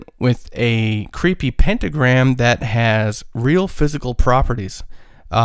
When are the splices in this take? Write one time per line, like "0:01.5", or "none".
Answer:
none